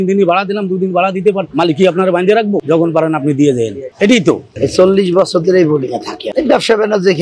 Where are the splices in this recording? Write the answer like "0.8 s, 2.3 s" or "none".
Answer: 2.6 s, 4.5 s